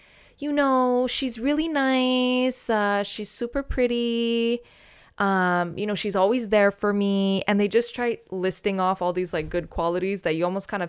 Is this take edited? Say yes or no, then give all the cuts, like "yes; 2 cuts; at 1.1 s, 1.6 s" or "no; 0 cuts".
no; 0 cuts